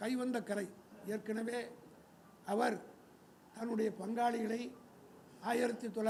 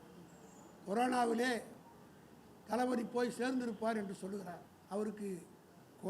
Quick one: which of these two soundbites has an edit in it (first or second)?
second